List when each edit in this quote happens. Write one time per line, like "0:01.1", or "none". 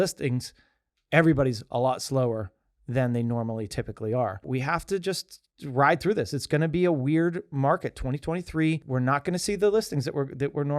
0:04.5
0:08.8